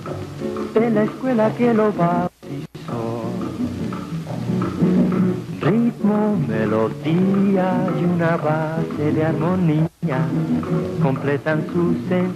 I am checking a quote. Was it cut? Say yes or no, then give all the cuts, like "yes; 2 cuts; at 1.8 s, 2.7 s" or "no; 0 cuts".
yes; 1 cut; at 6.5 s